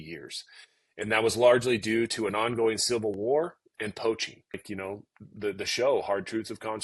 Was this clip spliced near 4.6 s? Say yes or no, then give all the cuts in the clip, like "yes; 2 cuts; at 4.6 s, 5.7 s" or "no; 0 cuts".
yes; 1 cut; at 4.6 s